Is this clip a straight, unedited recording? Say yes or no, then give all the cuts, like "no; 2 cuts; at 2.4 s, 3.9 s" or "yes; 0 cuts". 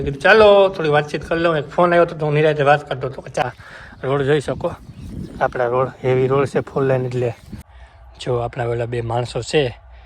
no; 2 cuts; at 3.4 s, 8.1 s